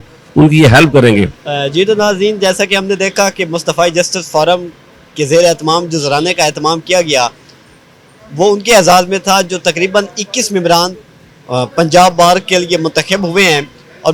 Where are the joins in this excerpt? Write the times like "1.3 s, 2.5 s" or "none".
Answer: none